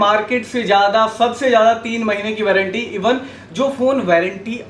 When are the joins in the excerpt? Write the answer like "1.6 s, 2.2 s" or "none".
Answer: none